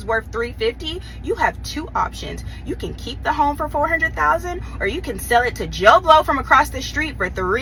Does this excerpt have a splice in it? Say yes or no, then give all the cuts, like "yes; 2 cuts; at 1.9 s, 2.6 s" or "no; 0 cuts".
no; 0 cuts